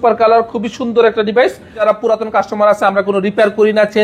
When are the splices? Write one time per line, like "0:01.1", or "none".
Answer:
0:01.8